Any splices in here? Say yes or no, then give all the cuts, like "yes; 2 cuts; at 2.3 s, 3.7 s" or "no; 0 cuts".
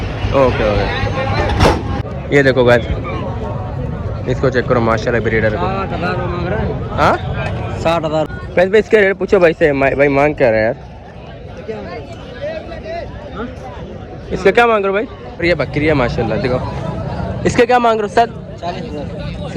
yes; 3 cuts; at 2.0 s, 8.3 s, 15.3 s